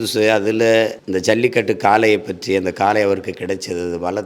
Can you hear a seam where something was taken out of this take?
yes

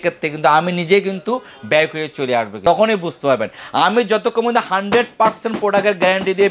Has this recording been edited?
no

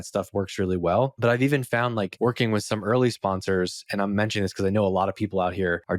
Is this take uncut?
no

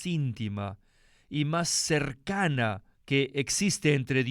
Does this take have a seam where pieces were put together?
yes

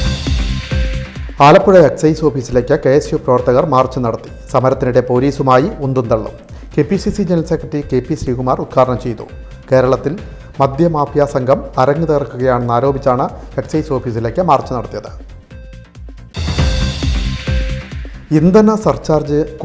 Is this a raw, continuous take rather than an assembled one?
no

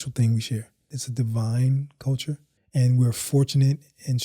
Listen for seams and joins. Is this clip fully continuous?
no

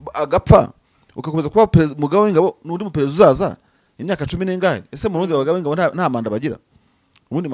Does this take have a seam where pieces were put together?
no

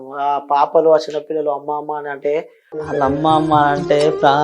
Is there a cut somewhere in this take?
yes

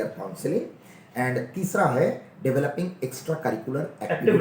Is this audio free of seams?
yes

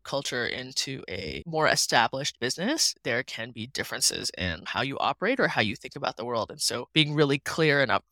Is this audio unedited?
no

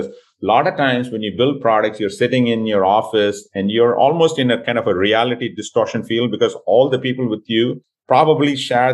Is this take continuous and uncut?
no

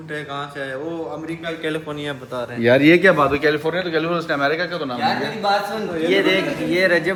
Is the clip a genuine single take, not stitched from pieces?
yes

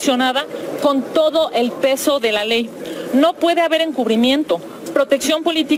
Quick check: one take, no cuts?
yes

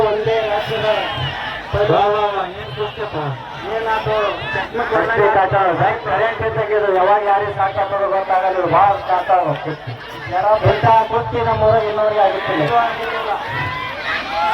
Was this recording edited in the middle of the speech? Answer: no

